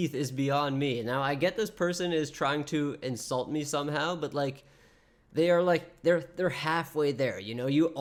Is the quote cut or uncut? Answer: uncut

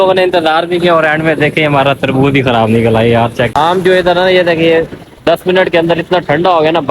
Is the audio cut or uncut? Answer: cut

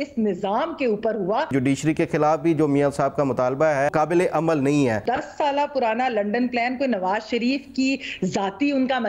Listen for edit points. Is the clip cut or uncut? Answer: cut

